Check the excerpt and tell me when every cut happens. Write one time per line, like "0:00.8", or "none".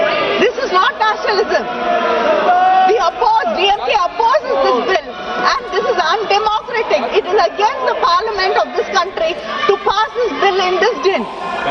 none